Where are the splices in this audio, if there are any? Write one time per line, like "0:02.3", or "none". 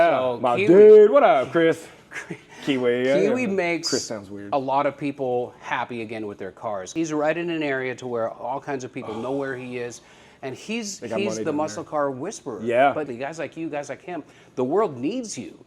0:06.9
0:13.1